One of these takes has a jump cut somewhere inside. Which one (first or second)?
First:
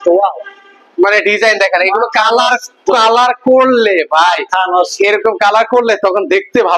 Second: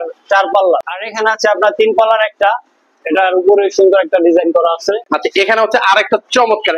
second